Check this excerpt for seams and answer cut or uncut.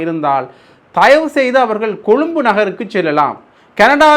uncut